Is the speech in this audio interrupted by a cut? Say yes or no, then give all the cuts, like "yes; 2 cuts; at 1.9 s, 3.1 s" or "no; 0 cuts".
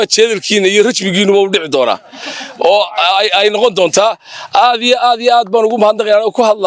no; 0 cuts